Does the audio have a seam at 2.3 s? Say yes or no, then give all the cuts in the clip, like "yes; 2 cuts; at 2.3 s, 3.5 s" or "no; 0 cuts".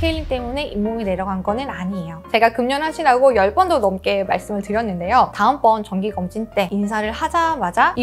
yes; 1 cut; at 2.3 s